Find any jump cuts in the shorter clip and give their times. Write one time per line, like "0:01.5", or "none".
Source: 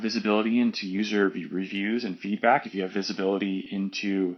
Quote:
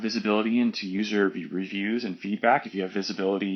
none